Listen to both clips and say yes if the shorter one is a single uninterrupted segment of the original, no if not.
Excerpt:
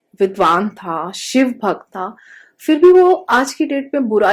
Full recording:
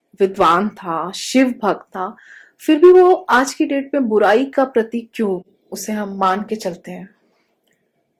yes